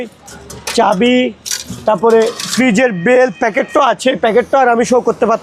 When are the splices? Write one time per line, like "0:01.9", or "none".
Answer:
none